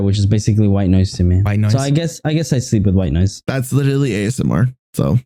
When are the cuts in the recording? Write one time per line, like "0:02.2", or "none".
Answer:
none